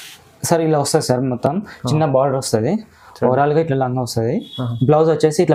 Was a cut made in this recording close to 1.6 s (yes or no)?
no